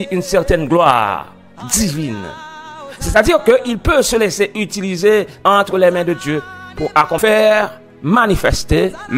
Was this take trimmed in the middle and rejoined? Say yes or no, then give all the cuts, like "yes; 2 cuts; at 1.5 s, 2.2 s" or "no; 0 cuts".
yes; 1 cut; at 7.2 s